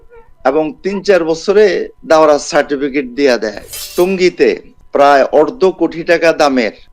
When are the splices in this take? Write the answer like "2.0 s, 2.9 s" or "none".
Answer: 3.7 s